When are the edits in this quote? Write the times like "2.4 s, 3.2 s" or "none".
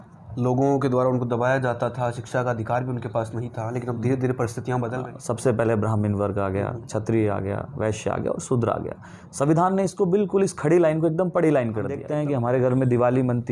5.0 s, 12.0 s